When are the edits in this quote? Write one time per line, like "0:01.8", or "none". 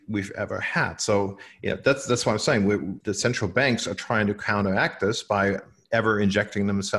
0:03.0
0:05.7

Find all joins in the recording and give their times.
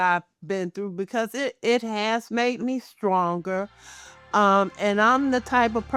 none

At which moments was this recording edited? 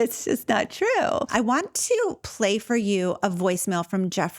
0:01.3

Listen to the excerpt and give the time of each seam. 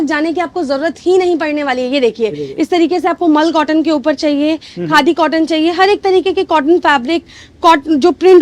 none

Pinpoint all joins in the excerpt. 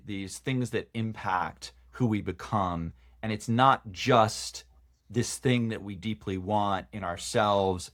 none

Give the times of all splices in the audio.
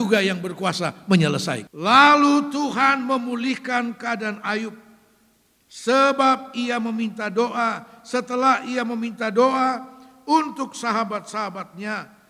0:01.7

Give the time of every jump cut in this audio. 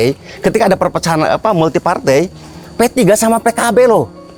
none

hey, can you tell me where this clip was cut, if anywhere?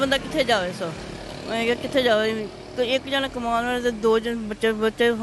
none

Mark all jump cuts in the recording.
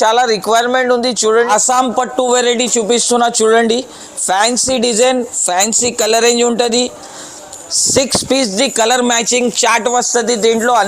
0:01.5

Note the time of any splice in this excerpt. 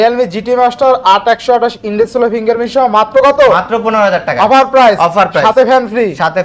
none

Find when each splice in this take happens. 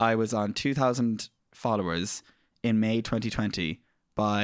none

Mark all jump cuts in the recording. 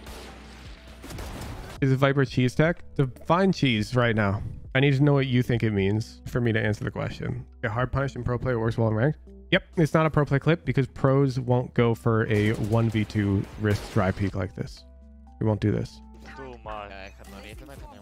none

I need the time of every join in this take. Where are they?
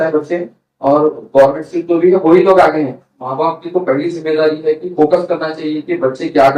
0:02.9

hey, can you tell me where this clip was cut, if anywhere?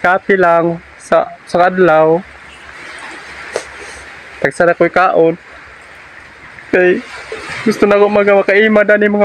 none

